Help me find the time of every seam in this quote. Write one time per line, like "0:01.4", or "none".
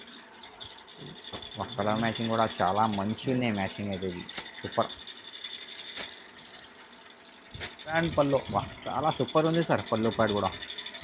0:07.9